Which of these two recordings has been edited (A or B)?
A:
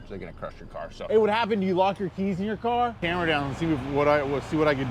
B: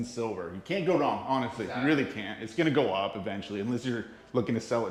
A